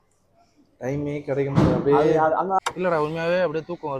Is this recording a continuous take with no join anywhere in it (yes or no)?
no